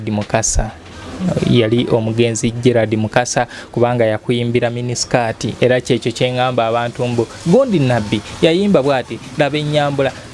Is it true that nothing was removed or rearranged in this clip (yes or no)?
yes